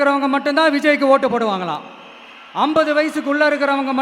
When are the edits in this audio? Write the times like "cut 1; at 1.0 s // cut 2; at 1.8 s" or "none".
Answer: none